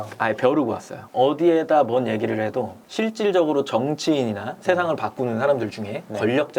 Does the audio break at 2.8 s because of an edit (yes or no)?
yes